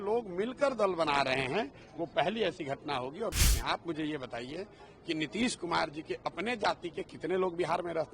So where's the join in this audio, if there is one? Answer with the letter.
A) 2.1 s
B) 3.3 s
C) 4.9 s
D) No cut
B